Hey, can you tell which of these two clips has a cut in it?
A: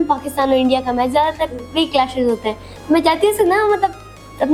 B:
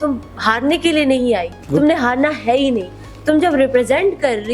B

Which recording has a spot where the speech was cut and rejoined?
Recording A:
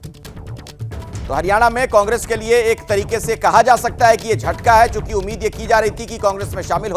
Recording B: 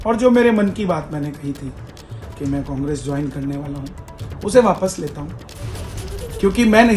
A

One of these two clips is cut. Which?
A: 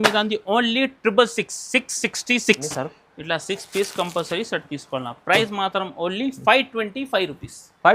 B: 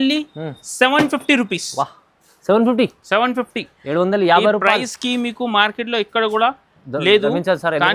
A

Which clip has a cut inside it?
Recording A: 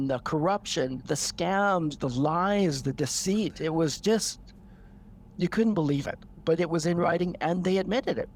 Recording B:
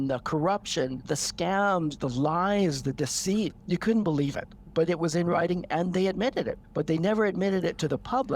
B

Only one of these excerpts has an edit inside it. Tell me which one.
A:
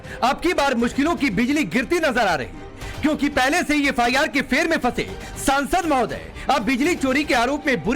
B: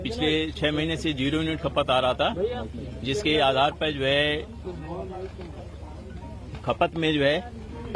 A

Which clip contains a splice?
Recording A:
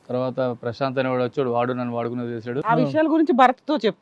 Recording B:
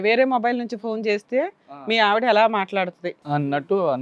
A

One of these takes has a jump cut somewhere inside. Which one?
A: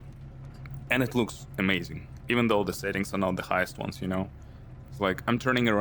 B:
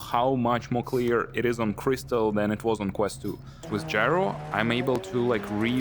B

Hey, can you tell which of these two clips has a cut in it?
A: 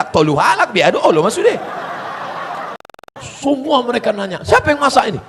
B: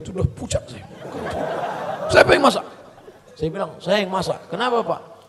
A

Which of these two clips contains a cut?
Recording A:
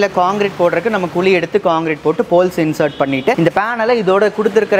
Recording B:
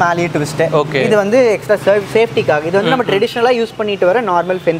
A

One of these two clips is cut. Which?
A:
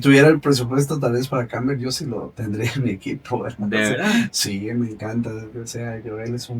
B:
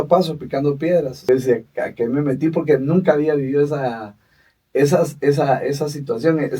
B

